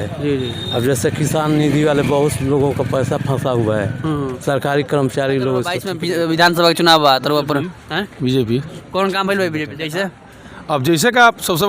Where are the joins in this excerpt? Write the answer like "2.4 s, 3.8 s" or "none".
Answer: 5.9 s, 9.8 s